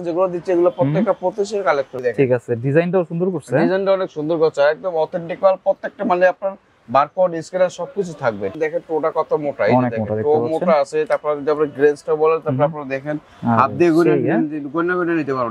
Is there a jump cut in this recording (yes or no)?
yes